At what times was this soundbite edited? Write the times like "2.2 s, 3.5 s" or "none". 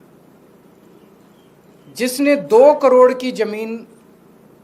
none

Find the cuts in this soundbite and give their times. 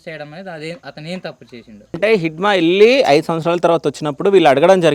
2.0 s

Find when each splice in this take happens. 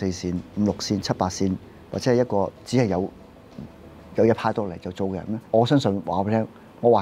5.3 s

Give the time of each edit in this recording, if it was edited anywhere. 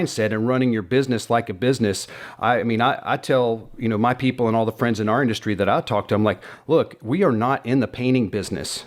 none

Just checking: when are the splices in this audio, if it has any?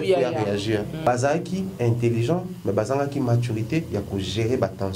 1.0 s

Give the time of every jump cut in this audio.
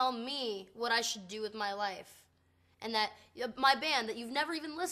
none

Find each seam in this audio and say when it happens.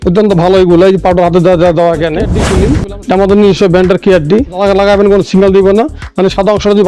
2.4 s, 4.6 s

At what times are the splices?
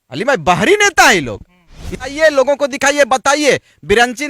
2.1 s

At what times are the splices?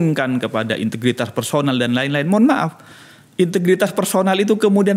none

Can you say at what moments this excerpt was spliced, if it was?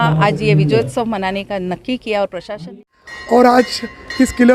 2.8 s

